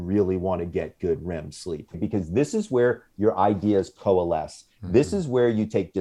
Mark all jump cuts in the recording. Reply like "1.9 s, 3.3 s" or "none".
2.0 s

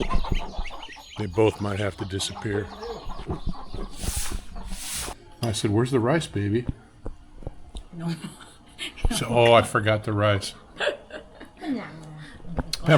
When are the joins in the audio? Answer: 5.2 s

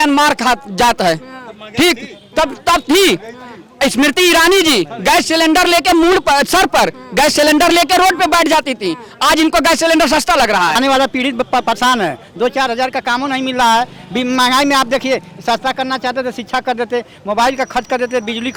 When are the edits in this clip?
10.8 s

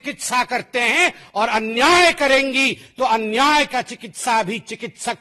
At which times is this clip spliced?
none

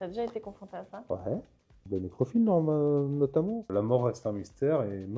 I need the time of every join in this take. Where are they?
3.7 s

